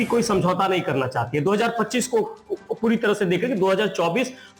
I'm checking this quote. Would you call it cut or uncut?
uncut